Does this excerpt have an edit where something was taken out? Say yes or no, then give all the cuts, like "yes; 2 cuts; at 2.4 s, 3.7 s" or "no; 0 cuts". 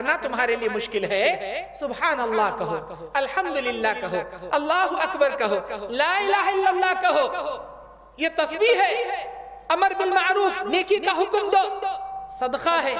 no; 0 cuts